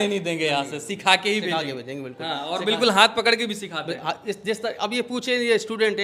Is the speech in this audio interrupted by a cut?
no; 0 cuts

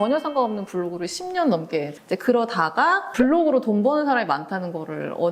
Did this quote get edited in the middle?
yes; 2 cuts; at 2.0 s, 3.1 s

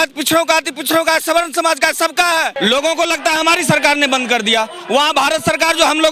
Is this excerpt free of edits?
no; 1 cut; at 2.5 s

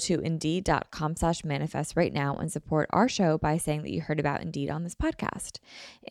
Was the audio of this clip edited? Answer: no; 0 cuts

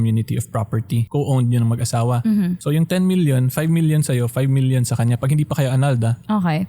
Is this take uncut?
no; 2 cuts; at 1.0 s, 2.6 s

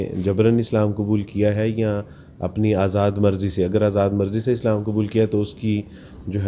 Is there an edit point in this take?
no; 0 cuts

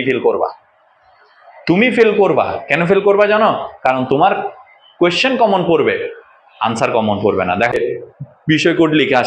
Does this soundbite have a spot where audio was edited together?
yes; 1 cut; at 8.0 s

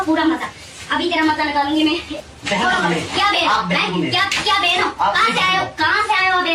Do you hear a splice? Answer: yes; 1 cut; at 2.1 s

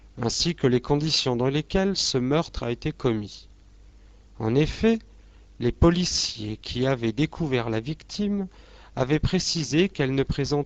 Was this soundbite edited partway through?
no; 0 cuts

